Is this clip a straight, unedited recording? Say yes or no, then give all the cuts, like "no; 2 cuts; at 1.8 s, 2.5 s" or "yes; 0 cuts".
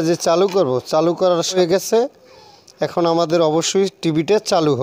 no; 1 cut; at 1.6 s